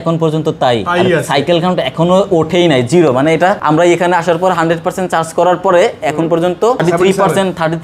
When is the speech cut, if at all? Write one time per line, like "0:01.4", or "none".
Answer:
0:03.6
0:06.8